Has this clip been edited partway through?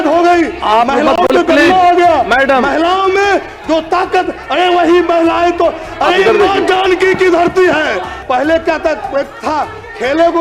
yes; 1 cut; at 8.1 s

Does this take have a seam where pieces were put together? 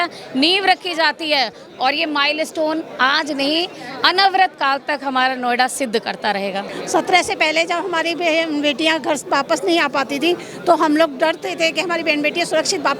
yes; 1 cut; at 6.8 s

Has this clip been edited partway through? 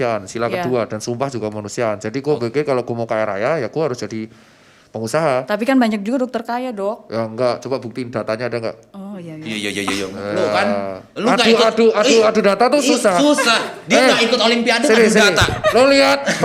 no; 0 cuts

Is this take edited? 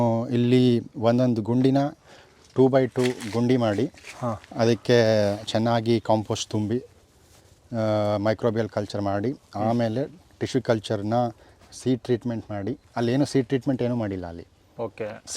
no; 0 cuts

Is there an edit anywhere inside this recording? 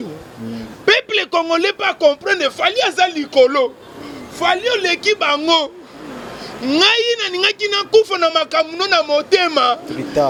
no; 0 cuts

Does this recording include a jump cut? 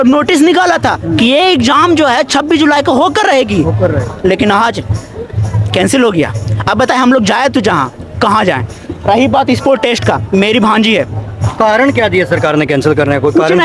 no; 0 cuts

